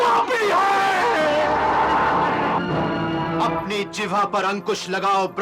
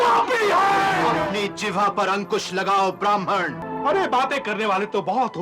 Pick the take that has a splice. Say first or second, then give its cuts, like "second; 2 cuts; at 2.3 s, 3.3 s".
second; 2 cuts; at 1.1 s, 3.6 s